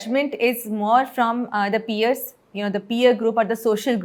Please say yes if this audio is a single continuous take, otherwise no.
yes